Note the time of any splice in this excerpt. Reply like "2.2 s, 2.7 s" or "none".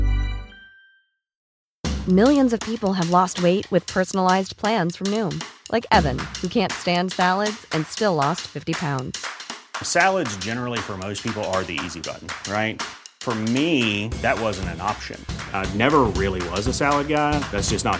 1.4 s